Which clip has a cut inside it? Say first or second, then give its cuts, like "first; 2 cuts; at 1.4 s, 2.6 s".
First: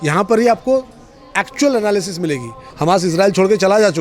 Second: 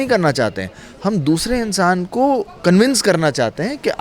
first; 1 cut; at 2.7 s